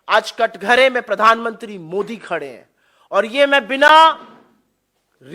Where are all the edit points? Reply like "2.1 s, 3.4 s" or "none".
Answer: none